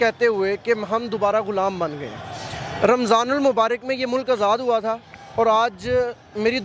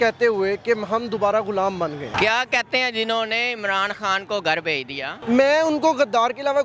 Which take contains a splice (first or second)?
second